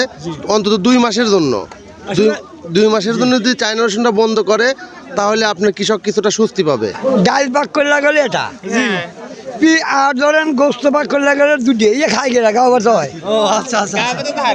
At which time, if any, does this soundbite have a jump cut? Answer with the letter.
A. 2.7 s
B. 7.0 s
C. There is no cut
B